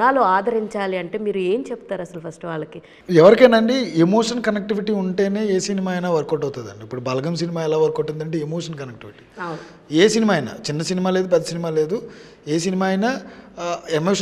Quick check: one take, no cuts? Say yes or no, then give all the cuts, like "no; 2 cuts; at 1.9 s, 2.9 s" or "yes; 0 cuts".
no; 1 cut; at 2.9 s